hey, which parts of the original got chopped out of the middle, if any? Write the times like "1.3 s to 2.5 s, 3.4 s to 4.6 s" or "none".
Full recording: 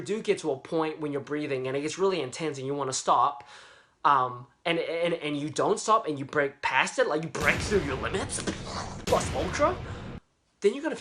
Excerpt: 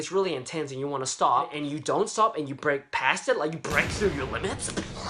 3.4 s to 5.2 s